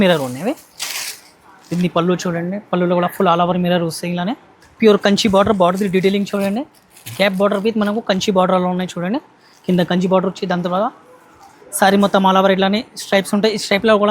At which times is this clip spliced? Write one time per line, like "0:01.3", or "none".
0:04.6